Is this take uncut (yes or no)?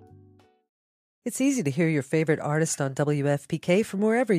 no